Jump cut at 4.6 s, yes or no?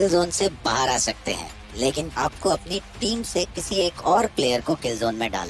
no